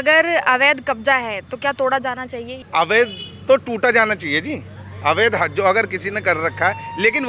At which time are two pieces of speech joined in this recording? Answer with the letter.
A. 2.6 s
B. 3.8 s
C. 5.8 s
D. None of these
A